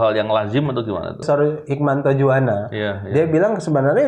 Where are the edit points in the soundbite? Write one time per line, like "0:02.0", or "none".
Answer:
0:01.2